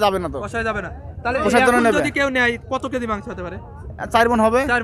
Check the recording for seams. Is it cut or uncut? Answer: uncut